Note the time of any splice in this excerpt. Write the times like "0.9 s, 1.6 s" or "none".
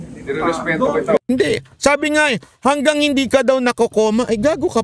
1.2 s